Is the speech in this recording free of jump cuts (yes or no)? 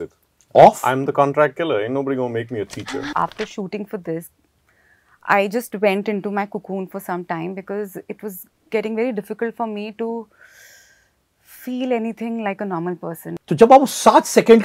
no